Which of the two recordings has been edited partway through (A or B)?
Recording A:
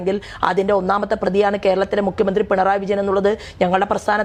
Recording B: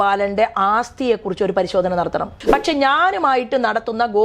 B